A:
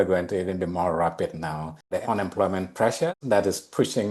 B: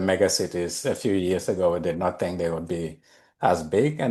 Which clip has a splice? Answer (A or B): A